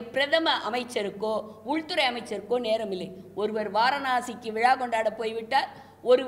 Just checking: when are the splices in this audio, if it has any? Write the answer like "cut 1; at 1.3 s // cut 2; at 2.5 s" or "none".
none